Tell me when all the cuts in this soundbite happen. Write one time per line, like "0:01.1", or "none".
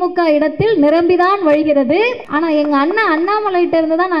0:02.2